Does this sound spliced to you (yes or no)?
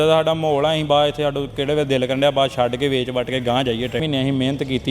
yes